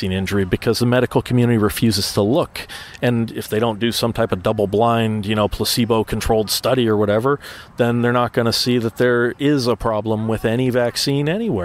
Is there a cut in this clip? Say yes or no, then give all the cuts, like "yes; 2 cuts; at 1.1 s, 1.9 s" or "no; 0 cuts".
no; 0 cuts